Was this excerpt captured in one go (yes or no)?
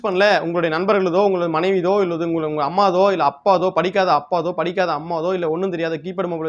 yes